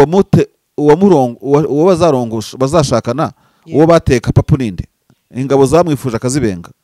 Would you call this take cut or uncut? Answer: uncut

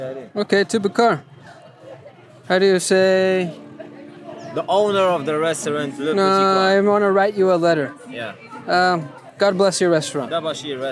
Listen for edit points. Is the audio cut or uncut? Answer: uncut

